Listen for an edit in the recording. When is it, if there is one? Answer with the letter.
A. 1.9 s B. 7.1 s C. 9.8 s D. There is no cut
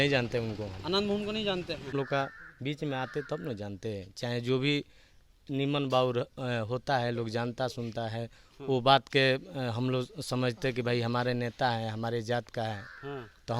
A